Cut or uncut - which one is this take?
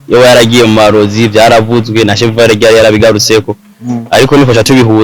uncut